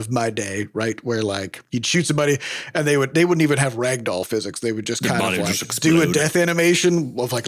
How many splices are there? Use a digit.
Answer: 1